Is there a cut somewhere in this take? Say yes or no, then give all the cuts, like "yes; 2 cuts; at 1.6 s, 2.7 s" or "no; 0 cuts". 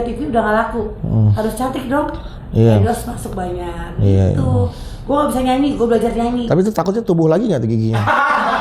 no; 0 cuts